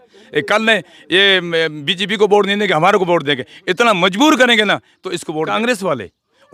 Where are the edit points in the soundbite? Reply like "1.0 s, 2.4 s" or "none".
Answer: 5.5 s